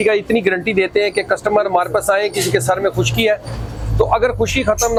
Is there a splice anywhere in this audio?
no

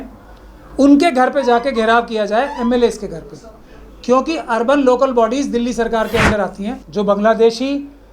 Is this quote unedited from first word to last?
no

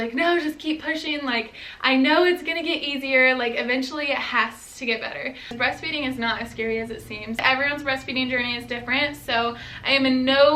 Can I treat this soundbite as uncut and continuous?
no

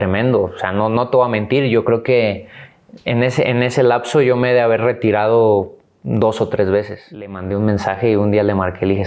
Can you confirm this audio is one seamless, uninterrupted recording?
no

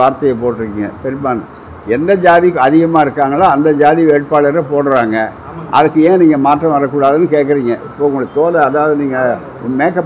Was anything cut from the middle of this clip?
no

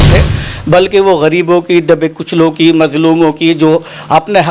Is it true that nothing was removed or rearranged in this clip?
yes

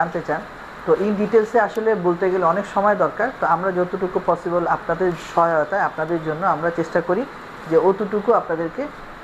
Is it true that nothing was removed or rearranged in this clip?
yes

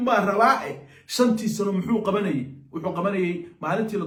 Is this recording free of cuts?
yes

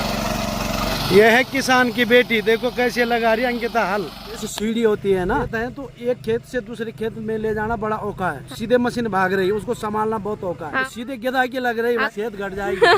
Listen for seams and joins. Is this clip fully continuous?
no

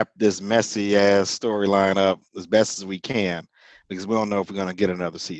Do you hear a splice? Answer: no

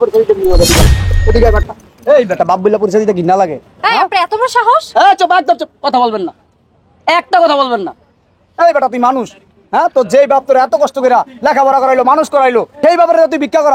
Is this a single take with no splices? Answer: no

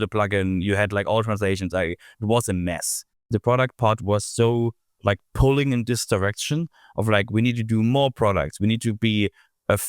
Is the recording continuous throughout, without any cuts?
no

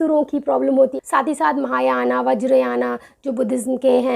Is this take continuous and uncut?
no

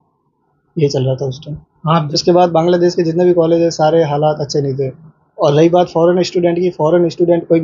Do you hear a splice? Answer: yes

